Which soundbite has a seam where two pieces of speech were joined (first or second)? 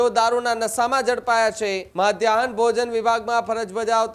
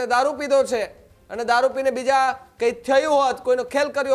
first